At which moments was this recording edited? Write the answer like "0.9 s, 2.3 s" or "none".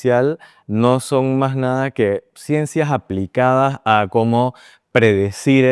none